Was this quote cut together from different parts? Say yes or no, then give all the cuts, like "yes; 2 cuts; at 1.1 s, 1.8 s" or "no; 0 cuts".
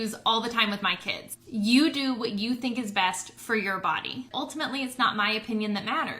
yes; 1 cut; at 4.3 s